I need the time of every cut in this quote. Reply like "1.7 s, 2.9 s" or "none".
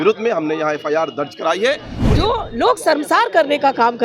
1.9 s